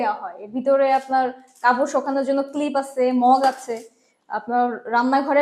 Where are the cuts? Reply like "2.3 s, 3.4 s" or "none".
none